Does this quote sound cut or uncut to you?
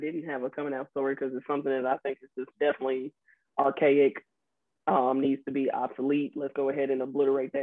uncut